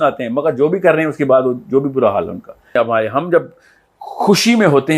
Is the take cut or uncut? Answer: cut